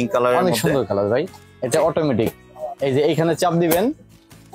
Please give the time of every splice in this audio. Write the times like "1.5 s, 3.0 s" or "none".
none